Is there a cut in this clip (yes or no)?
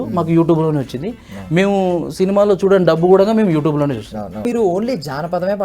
yes